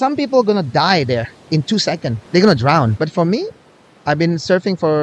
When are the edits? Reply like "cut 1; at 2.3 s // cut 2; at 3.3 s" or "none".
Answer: cut 1; at 2.1 s // cut 2; at 2.9 s